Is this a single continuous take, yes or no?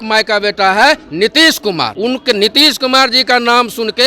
no